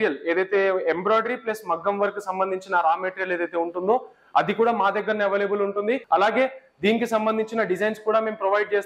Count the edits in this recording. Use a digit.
1